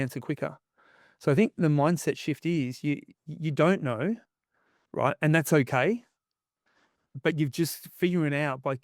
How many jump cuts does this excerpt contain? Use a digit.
0